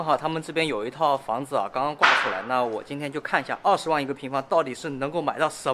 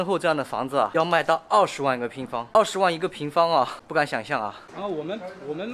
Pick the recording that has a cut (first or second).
second